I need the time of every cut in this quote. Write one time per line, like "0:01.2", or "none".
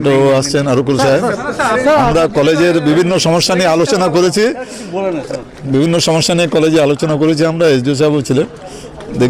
none